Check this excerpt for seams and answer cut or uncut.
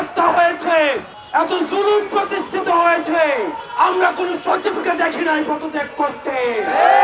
cut